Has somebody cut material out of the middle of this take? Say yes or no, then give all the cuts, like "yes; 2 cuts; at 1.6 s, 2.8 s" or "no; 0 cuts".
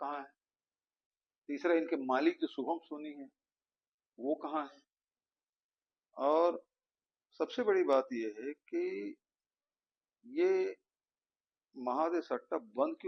no; 0 cuts